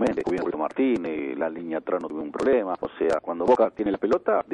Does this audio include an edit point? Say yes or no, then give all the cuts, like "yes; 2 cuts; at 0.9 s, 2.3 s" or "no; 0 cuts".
yes; 1 cut; at 1.9 s